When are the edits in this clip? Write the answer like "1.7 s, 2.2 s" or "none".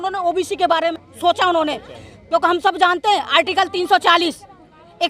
1.0 s

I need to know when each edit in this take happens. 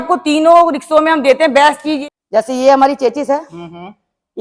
2.0 s

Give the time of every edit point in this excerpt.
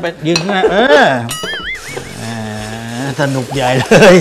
1.8 s

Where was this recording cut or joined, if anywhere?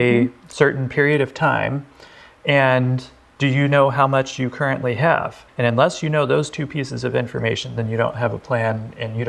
5.4 s

